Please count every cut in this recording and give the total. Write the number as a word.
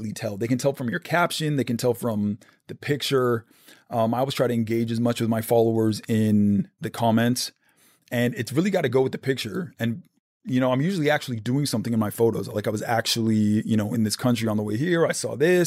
one